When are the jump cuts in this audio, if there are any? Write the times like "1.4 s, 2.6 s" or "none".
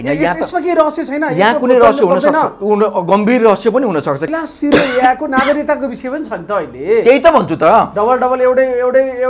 4.2 s